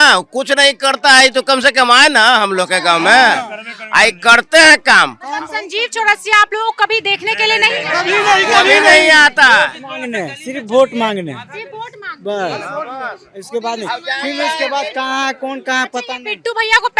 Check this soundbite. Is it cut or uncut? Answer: uncut